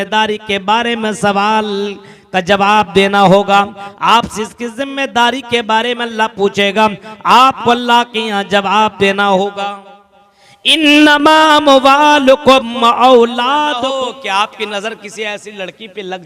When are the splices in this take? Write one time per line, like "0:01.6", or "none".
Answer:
0:13.7